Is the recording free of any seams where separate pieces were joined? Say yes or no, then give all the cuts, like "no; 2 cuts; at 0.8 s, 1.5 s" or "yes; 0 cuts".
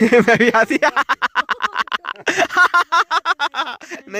yes; 0 cuts